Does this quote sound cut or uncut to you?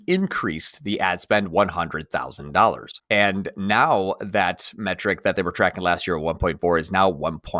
cut